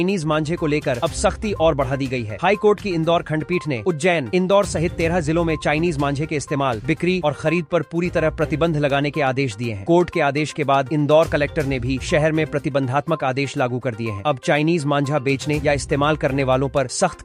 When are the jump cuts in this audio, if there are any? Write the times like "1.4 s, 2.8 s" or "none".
none